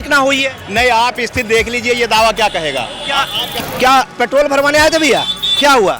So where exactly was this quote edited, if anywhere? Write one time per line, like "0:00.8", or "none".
0:03.4